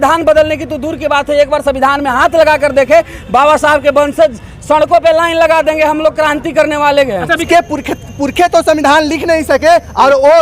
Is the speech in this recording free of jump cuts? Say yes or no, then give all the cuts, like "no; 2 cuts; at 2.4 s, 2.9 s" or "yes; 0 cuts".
no; 1 cut; at 7.4 s